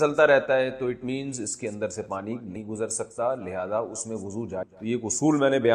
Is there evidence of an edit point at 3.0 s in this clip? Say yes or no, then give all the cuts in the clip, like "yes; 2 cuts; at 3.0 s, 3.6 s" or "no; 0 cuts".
no; 1 cut; at 4.6 s